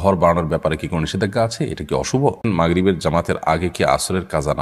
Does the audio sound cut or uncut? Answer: cut